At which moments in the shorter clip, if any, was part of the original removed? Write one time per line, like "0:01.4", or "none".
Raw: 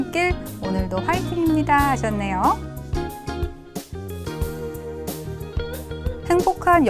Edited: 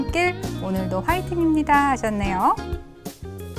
0:02.6